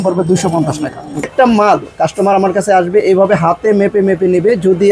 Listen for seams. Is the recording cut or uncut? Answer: cut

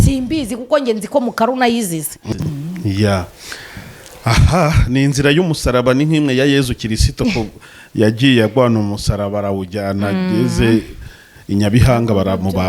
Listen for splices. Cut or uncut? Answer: cut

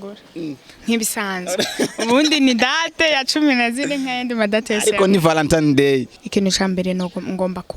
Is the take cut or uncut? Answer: cut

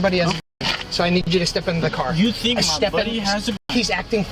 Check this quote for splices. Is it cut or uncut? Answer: uncut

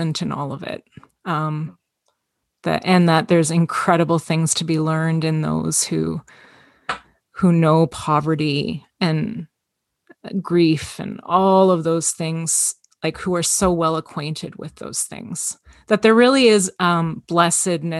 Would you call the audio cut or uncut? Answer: uncut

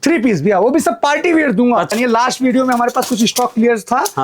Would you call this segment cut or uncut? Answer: cut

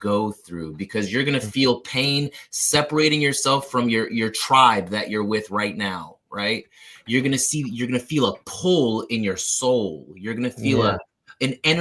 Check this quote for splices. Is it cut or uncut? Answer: uncut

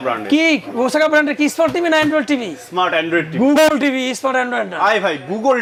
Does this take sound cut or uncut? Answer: uncut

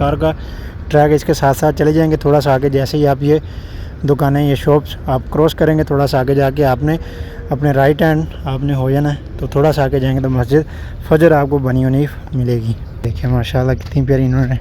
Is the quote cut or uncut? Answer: cut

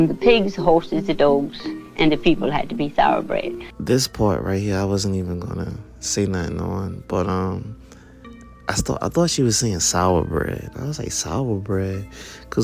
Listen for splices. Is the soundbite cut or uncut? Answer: uncut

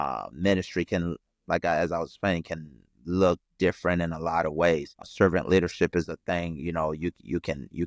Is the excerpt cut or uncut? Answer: cut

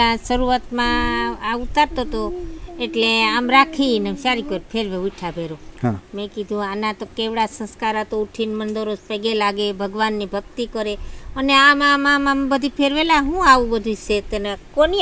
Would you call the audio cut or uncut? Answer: uncut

